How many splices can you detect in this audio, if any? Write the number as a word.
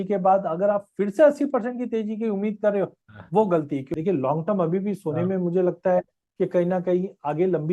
one